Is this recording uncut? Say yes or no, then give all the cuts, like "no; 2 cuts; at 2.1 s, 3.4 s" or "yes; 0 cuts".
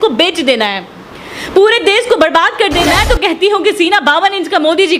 no; 1 cut; at 2.9 s